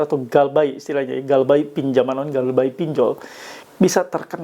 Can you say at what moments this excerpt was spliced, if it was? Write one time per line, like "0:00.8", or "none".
none